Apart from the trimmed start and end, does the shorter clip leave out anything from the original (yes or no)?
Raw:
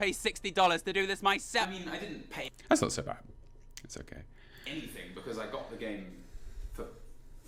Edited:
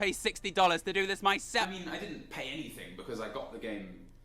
yes